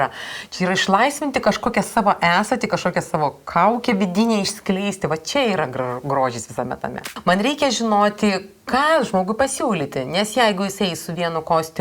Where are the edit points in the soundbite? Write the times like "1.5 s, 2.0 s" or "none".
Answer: 7.1 s